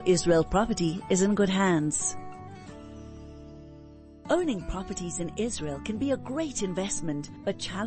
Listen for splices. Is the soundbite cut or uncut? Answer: cut